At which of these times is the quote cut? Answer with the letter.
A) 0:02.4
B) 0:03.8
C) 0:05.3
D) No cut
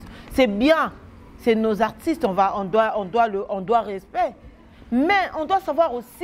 D